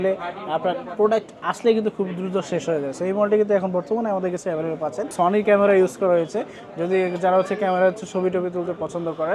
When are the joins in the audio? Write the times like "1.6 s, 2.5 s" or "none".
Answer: 5.1 s